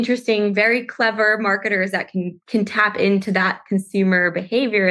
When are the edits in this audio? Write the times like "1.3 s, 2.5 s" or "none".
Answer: 2.4 s